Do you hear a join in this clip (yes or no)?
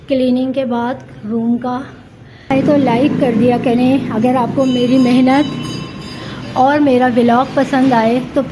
yes